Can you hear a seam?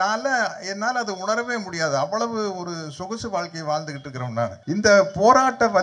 yes; 1 cut; at 4.6 s

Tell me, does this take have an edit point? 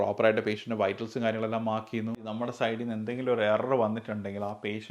yes; 1 cut; at 2.4 s

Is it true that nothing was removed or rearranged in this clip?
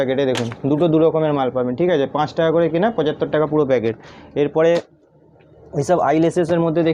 yes; 0 cuts

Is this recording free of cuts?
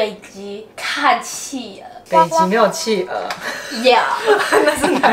yes; 0 cuts

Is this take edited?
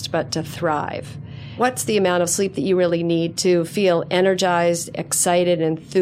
yes; 2 cuts; at 1.6 s, 3.3 s

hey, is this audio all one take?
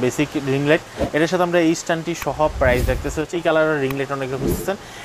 no; 1 cut; at 3.3 s

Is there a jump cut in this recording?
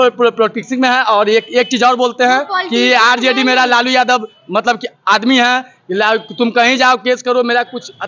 no; 0 cuts

